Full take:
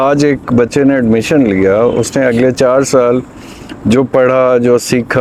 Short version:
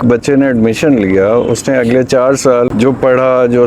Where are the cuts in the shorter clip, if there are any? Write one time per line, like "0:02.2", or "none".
0:02.7